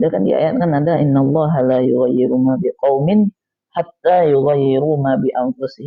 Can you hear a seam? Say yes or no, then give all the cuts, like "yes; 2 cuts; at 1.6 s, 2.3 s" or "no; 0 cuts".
no; 0 cuts